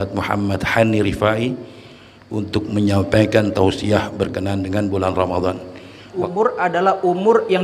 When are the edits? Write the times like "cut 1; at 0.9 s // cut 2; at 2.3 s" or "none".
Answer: cut 1; at 6.1 s